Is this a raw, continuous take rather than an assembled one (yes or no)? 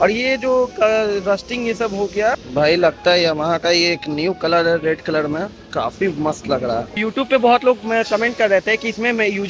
no